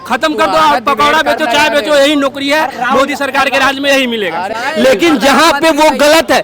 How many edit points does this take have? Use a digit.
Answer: 1